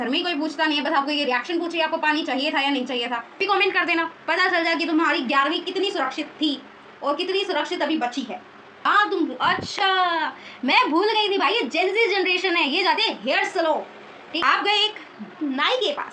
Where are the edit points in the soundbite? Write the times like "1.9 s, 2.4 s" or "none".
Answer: 3.4 s, 8.8 s, 14.4 s